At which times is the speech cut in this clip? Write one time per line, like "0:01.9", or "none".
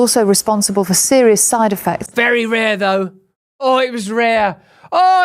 none